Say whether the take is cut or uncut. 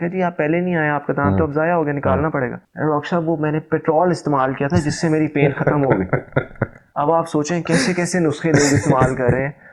uncut